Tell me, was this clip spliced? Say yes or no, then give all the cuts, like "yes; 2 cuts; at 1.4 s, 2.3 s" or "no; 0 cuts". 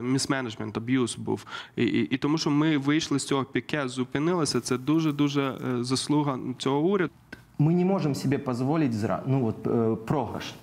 yes; 1 cut; at 7.1 s